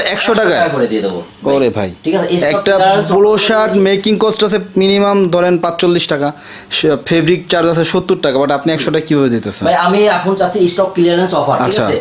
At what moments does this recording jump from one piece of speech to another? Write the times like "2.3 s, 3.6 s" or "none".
none

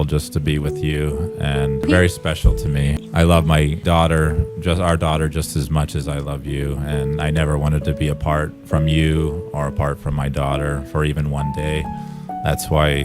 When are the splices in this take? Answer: 1.9 s, 3.0 s, 3.8 s

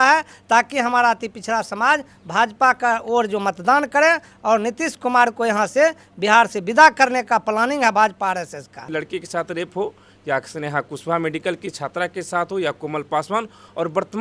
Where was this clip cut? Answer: 8.8 s

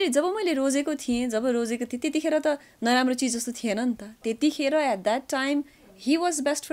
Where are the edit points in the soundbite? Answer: none

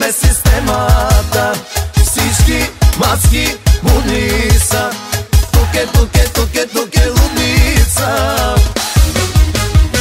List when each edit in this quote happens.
8.7 s

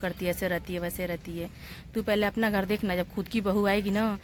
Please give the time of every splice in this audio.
none

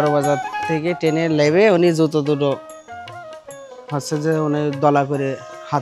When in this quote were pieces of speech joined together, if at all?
none

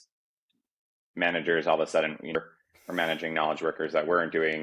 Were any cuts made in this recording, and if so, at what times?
2.4 s

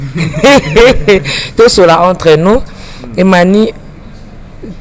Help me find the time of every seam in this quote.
none

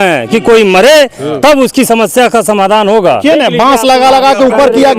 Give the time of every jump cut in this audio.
3.2 s

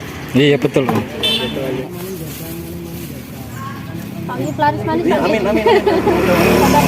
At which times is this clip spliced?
1.8 s

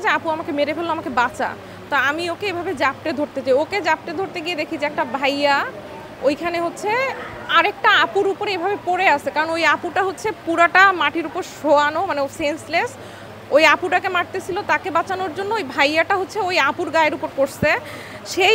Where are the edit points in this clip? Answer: none

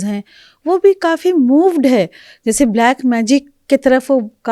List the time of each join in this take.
none

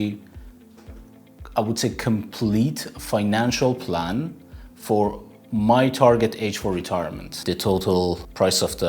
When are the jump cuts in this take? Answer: 7.3 s

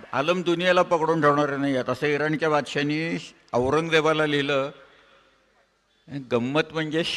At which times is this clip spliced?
none

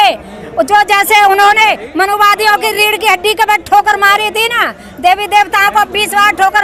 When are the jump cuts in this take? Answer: none

